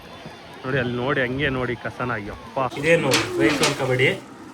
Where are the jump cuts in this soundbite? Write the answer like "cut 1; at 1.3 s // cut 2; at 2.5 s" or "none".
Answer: cut 1; at 2.8 s